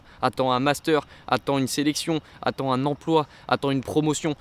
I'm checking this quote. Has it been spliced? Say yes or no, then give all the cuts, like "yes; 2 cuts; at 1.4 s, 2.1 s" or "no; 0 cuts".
no; 0 cuts